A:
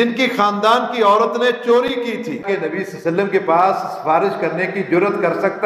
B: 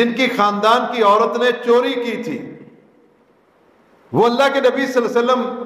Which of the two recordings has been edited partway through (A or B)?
A